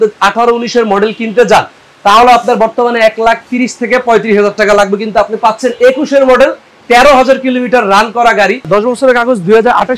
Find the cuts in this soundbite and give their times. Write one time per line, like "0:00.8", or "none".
0:08.7